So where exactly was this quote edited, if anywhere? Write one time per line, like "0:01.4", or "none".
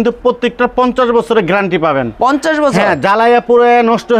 none